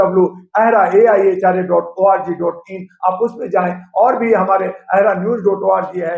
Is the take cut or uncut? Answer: uncut